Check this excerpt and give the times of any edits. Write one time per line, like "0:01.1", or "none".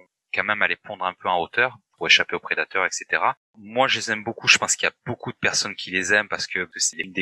0:03.5

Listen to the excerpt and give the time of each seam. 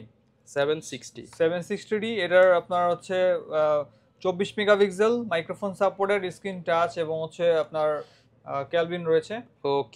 none

